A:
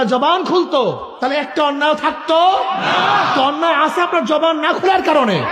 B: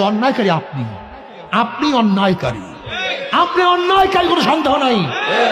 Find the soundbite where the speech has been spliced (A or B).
A